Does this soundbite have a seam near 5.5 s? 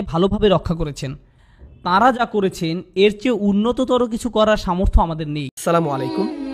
yes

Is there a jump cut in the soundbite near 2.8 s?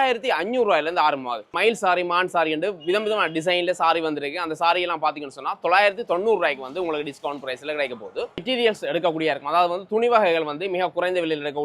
no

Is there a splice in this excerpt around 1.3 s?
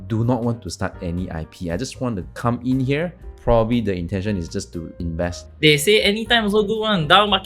no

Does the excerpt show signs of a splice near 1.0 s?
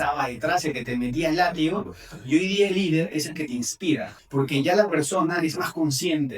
no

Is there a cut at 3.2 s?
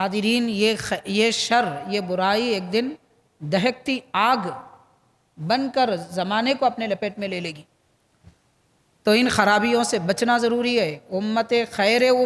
no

